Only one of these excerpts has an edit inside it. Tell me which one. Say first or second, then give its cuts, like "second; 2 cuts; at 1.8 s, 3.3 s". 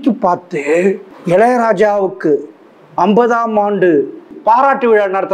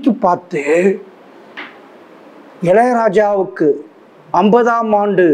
first; 2 cuts; at 1.1 s, 4.3 s